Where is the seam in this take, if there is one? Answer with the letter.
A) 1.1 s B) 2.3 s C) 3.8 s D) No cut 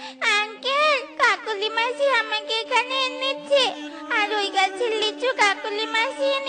D